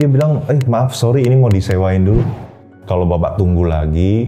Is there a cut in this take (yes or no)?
yes